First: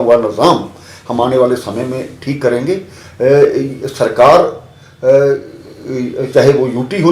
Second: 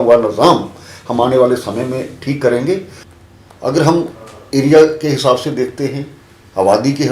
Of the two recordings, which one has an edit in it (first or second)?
second